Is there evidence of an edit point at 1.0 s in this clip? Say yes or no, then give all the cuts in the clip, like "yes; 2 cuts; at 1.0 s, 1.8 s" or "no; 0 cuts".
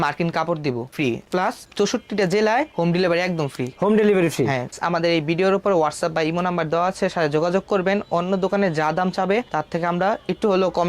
yes; 2 cuts; at 1.0 s, 4.7 s